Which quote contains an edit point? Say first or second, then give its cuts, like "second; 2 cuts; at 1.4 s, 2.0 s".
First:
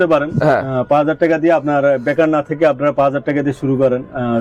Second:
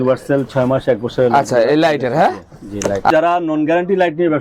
second; 1 cut; at 3.1 s